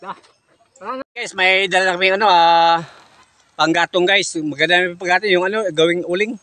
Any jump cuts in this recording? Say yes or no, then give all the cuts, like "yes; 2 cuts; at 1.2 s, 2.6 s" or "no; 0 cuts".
yes; 1 cut; at 1.0 s